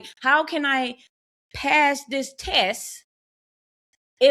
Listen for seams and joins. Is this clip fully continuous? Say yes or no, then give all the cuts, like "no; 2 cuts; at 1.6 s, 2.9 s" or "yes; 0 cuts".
yes; 0 cuts